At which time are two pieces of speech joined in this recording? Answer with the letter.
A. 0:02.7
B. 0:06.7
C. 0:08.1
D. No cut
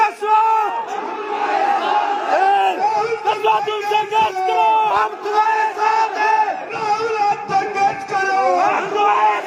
D